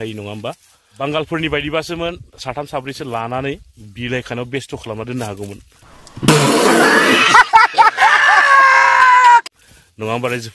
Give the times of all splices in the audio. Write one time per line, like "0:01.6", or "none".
0:01.0